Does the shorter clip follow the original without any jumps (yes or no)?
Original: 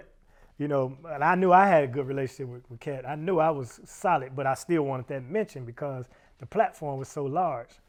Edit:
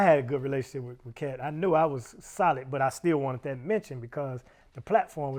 yes